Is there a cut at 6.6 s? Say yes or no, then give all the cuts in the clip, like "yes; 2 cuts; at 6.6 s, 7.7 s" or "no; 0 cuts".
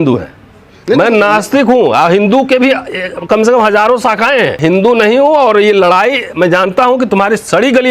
no; 1 cut; at 4.6 s